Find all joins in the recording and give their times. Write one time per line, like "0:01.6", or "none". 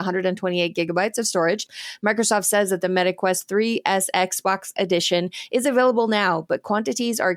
0:01.7

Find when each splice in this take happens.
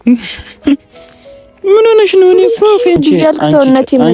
0:03.0

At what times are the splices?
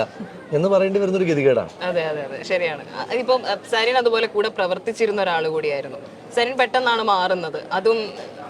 none

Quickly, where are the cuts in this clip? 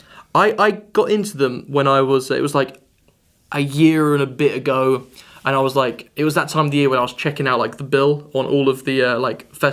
0:04.6

